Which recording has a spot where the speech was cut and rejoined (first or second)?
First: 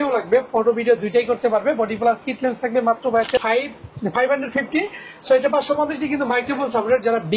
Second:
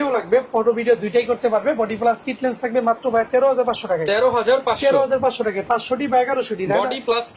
first